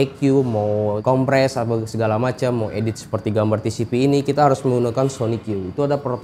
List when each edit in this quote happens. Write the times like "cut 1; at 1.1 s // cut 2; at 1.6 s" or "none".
none